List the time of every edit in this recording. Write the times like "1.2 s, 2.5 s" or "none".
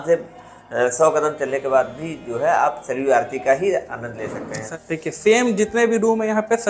4.6 s